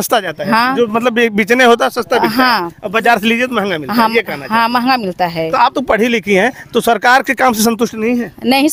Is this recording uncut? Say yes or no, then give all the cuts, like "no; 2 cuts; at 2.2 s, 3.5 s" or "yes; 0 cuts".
yes; 0 cuts